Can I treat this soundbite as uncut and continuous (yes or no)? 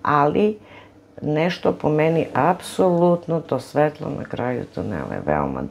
yes